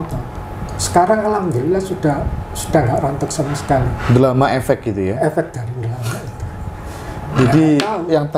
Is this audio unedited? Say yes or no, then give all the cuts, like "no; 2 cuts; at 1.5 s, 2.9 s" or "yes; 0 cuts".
yes; 0 cuts